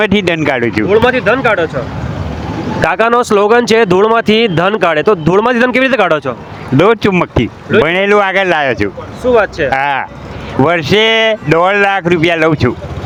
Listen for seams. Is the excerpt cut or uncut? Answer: uncut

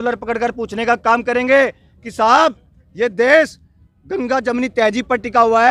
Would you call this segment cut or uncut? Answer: uncut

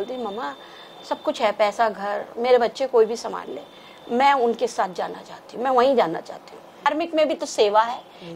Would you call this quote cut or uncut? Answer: cut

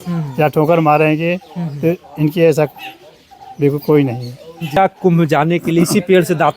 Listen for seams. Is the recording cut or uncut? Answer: cut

